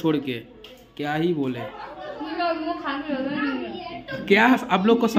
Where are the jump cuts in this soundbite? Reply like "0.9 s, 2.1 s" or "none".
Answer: none